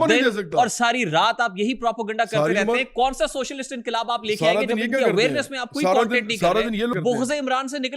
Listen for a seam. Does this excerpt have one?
yes; 1 cut; at 6.9 s

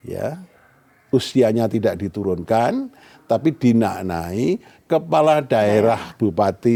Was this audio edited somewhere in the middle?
no; 0 cuts

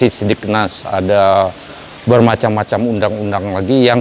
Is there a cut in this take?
no; 0 cuts

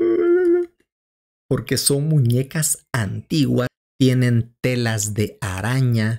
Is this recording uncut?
no; 1 cut; at 3.7 s

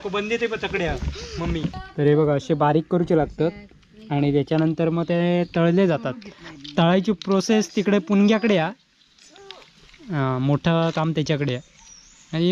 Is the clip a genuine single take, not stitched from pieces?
no; 1 cut; at 1.8 s

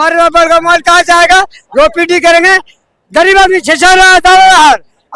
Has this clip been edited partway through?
no; 0 cuts

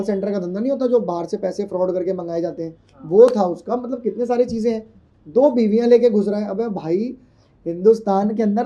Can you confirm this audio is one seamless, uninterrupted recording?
yes; 0 cuts

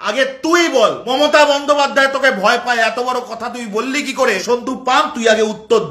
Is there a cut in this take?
yes; 2 cuts; at 1.0 s, 4.4 s

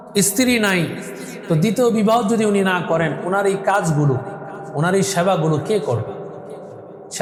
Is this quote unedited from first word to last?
yes; 0 cuts

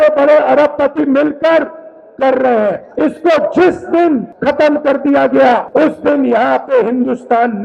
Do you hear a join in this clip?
yes; 3 cuts; at 2.9 s, 4.3 s, 5.7 s

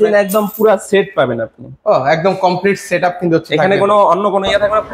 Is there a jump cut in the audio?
no; 0 cuts

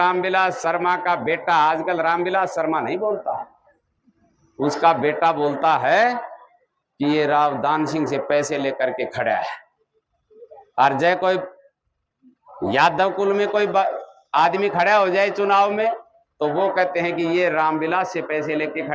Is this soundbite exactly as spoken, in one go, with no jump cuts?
yes; 0 cuts

